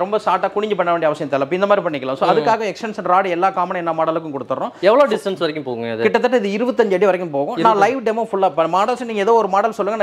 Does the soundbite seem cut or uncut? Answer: uncut